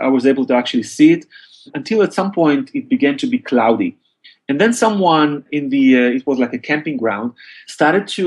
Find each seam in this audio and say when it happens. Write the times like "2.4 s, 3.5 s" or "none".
1.7 s